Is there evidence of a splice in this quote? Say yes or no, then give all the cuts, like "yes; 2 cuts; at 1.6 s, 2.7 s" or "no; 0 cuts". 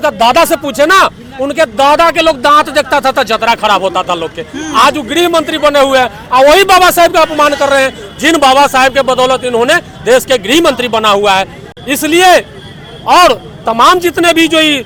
no; 0 cuts